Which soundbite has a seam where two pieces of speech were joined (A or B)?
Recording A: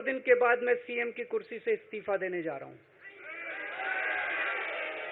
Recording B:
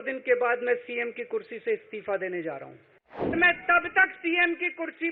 B